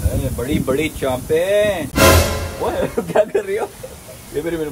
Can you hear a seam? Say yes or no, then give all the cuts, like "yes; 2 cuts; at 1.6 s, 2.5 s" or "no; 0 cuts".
yes; 1 cut; at 1.9 s